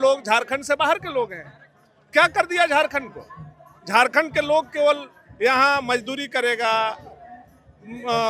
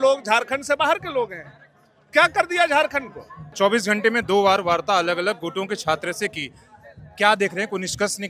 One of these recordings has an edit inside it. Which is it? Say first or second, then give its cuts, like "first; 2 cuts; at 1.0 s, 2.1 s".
second; 1 cut; at 3.5 s